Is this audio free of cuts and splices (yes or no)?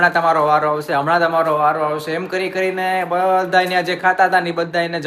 yes